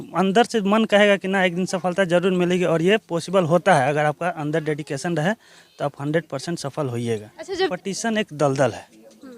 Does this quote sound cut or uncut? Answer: cut